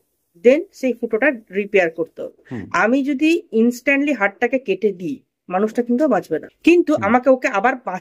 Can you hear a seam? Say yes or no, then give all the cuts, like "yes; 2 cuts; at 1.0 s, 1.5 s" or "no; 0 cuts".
yes; 2 cuts; at 2.7 s, 6.5 s